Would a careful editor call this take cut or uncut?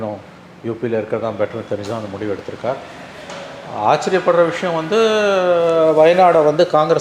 uncut